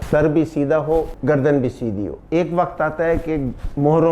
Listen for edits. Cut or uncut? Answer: cut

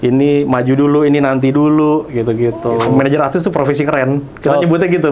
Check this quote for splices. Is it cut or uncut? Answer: cut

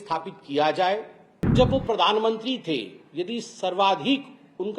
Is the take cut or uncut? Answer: cut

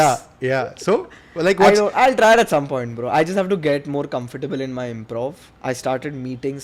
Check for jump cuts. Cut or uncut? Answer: cut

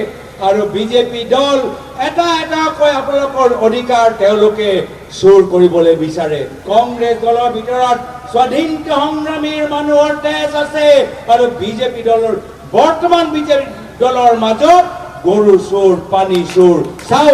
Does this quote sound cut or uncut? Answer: cut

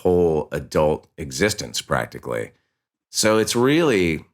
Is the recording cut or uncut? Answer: uncut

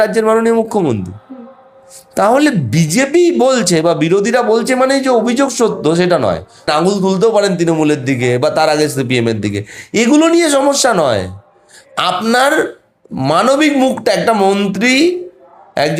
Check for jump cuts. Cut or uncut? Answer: cut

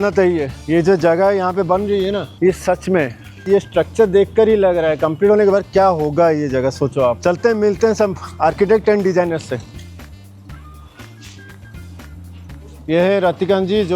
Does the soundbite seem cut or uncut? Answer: uncut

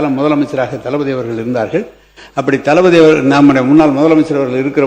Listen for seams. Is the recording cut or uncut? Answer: uncut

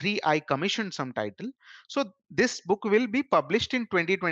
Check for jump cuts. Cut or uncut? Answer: uncut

